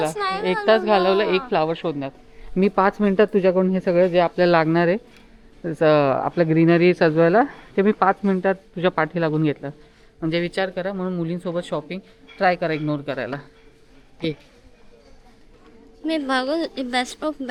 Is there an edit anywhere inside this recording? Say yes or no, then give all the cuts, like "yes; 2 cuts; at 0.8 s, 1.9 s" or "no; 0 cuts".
no; 0 cuts